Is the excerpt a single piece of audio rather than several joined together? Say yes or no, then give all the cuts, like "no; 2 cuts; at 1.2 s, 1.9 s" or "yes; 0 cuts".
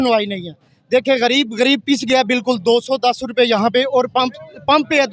yes; 0 cuts